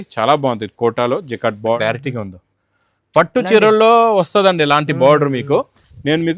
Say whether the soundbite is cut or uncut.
cut